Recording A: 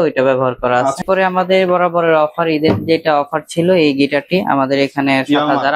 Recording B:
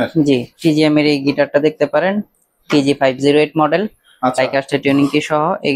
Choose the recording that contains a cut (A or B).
A